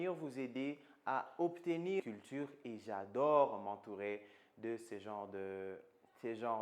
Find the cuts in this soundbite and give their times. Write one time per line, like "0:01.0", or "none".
0:02.0